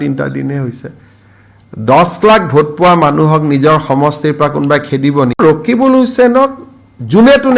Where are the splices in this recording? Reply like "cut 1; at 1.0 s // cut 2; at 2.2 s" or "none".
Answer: cut 1; at 5.4 s